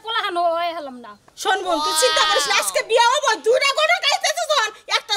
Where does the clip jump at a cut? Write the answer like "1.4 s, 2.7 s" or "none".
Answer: none